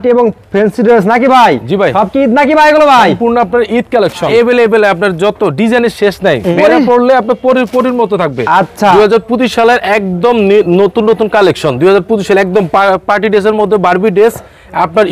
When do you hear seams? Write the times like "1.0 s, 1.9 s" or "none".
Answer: 4.3 s, 6.5 s, 8.9 s